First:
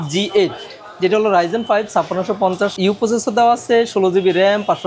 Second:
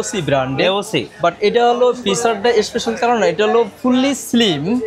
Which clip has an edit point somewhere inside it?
first; 1 cut; at 2.8 s

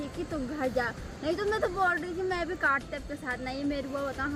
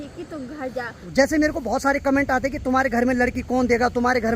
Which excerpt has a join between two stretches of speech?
second; 1 cut; at 1.0 s

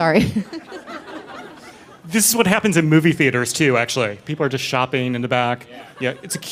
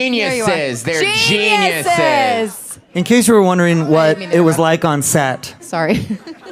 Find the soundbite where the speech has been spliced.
second; 1 cut; at 1.5 s

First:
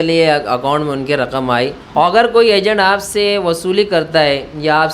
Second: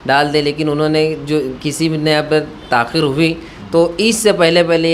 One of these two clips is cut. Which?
first; 1 cut; at 1.8 s

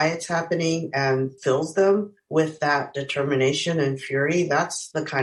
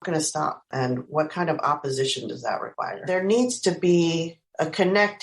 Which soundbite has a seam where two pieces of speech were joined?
second; 1 cut; at 3.0 s

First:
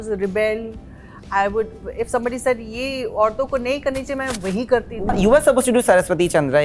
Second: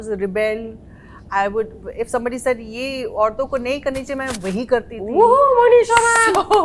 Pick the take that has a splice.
first; 1 cut; at 5.1 s

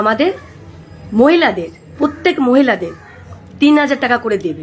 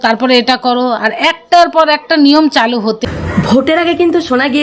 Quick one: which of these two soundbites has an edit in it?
second; 1 cut; at 3.0 s

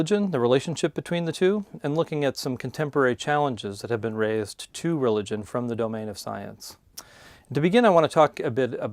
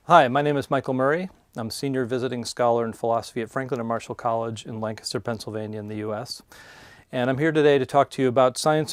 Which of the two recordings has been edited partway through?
first; 1 cut; at 1.5 s

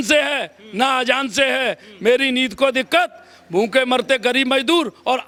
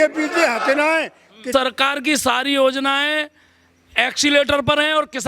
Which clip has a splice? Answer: second; 1 cut; at 1.5 s

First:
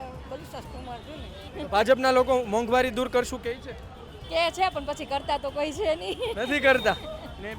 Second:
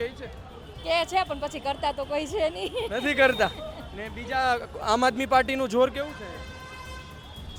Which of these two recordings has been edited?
first; 1 cut; at 1.4 s

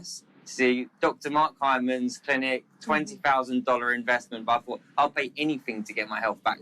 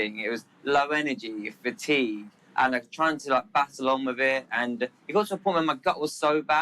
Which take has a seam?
second; 1 cut; at 2.3 s

